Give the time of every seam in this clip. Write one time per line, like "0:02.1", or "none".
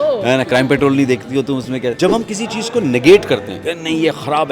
0:02.0